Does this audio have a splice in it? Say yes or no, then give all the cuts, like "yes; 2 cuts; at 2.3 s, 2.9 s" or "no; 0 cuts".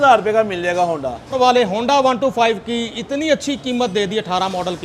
yes; 1 cut; at 1.3 s